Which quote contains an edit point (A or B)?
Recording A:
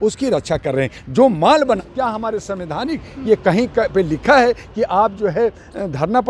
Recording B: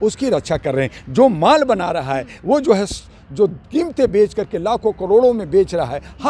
A